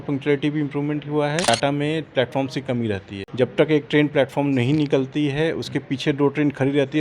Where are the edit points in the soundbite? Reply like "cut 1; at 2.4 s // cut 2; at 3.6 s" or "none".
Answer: cut 1; at 1.4 s // cut 2; at 3.2 s